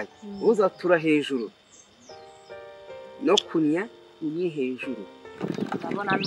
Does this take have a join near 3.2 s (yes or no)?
no